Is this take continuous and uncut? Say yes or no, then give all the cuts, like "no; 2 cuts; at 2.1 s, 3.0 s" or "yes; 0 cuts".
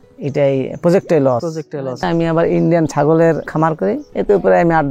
no; 2 cuts; at 2.0 s, 3.7 s